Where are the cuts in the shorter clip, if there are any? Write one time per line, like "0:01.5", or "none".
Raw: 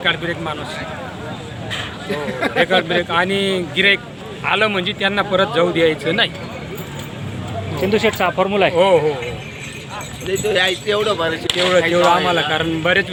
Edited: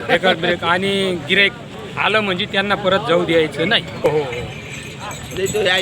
0:04.1